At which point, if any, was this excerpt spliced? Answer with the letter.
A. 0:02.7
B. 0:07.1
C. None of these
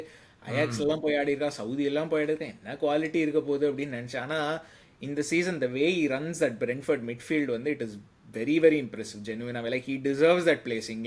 C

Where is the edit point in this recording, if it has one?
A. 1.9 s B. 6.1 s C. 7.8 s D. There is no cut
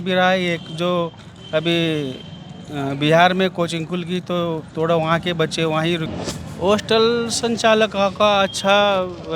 B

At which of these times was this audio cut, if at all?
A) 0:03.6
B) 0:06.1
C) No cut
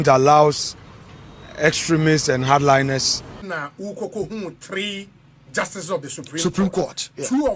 A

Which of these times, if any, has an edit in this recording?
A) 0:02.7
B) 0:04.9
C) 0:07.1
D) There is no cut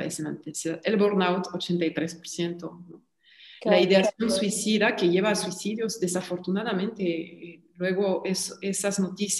D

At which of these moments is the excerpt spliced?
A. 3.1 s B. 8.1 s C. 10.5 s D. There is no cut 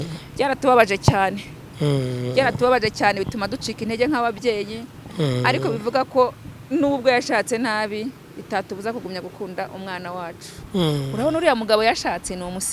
C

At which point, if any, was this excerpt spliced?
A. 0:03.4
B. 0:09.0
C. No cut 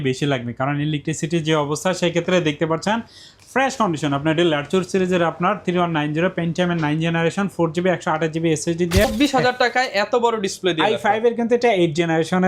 B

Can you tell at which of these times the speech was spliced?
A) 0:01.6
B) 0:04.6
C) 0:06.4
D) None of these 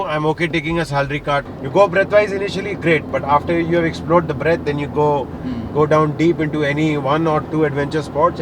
A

